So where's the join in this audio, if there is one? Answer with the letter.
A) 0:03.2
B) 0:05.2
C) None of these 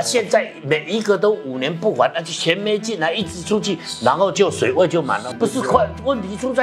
B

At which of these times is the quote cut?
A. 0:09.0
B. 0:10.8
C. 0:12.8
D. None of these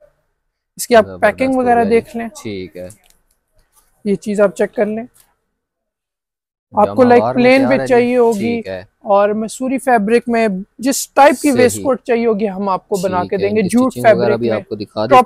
D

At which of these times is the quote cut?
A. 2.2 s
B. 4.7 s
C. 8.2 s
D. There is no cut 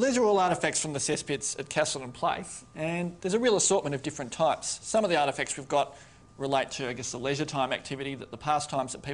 B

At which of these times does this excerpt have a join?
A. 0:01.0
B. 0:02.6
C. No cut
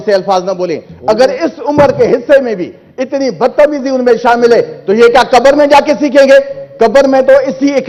C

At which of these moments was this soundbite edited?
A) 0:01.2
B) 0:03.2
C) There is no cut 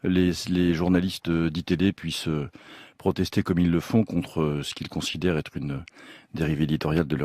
B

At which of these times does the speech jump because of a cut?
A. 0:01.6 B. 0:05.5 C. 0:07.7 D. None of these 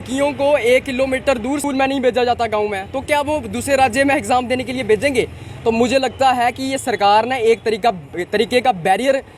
A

